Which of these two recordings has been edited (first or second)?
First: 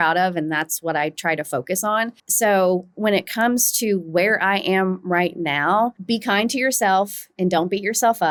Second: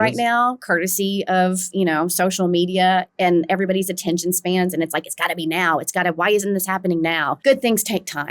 second